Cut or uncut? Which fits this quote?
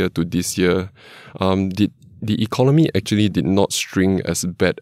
uncut